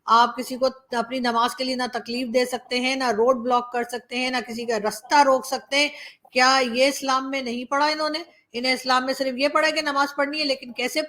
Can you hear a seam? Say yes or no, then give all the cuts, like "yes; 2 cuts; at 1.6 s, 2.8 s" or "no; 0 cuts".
no; 0 cuts